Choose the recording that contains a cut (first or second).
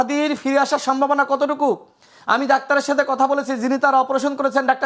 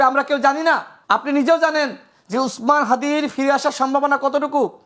second